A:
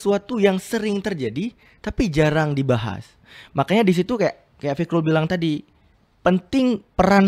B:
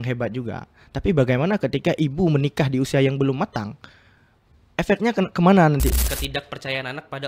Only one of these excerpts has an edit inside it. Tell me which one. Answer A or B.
B